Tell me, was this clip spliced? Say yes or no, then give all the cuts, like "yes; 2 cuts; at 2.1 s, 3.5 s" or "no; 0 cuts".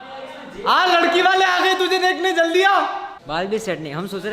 yes; 1 cut; at 3.0 s